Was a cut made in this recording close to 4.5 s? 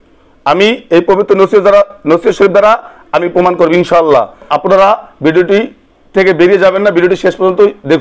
yes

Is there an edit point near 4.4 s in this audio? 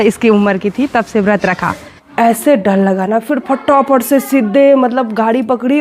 no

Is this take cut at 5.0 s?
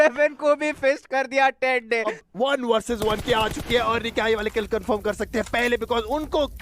no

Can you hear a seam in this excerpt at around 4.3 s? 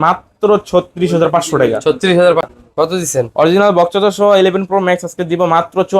no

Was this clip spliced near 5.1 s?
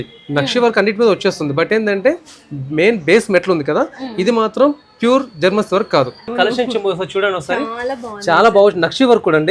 no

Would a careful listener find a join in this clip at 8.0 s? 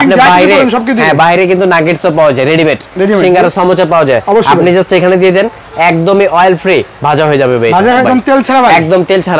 yes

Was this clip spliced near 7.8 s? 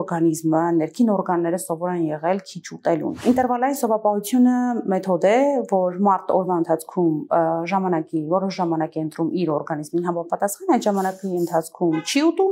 no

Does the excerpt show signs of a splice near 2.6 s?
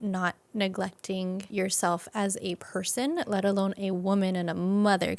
yes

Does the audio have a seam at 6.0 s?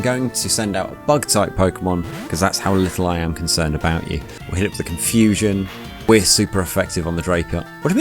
yes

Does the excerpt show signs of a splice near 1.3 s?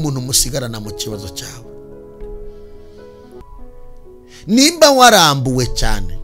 no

